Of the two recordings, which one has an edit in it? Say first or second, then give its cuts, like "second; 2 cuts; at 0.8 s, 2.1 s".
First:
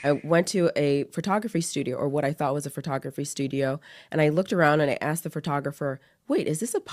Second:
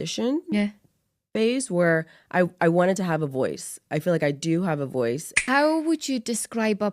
second; 1 cut; at 5.3 s